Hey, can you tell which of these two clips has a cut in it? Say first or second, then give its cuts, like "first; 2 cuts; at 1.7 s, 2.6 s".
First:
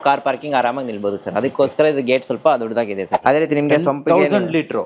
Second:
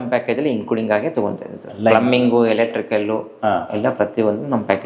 first; 1 cut; at 3.1 s